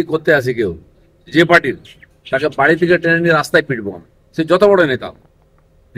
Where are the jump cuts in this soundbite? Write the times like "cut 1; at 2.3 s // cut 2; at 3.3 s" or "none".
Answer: none